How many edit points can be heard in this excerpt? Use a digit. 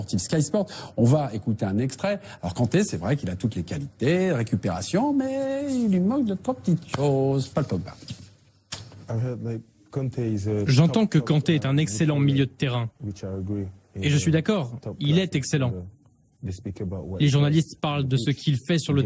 0